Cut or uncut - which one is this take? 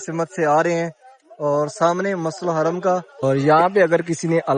cut